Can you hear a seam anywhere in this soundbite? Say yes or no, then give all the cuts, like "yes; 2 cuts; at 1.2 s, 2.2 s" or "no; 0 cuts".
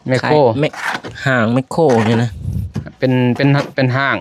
no; 0 cuts